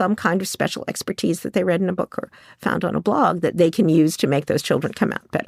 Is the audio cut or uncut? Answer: uncut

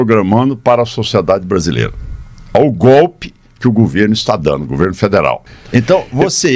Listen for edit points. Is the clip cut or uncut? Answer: cut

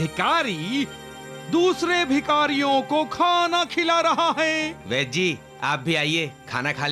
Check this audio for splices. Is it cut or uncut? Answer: cut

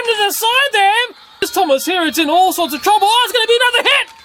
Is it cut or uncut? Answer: cut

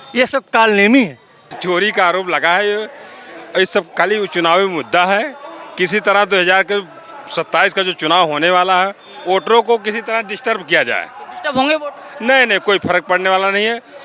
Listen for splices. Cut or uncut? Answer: cut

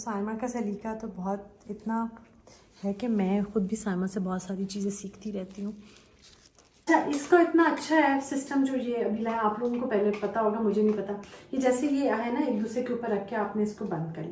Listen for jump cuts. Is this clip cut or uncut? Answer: cut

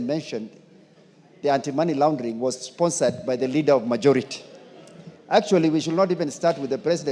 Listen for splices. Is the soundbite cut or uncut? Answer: uncut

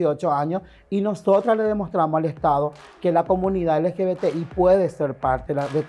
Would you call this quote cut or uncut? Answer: uncut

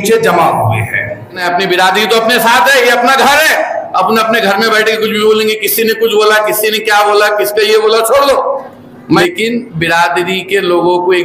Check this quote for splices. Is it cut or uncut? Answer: cut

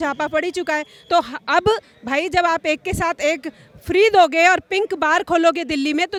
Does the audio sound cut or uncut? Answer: uncut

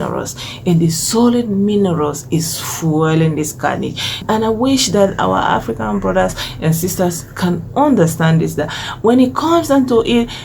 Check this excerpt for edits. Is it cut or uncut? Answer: cut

